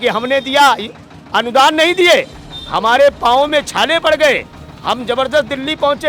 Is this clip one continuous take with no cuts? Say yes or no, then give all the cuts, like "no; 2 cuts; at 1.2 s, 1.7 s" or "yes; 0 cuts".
yes; 0 cuts